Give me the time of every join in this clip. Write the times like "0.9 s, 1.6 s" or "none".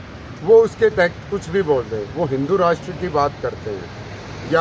none